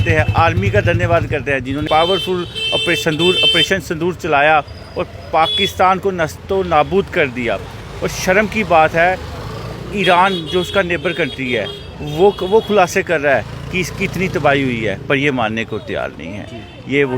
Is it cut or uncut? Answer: cut